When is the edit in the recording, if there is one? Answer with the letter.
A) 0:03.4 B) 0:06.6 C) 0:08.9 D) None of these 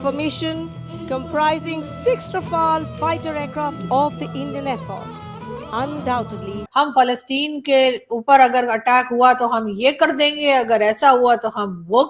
B